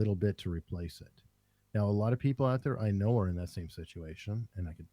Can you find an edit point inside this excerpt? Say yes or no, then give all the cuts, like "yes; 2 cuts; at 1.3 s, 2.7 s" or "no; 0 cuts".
no; 0 cuts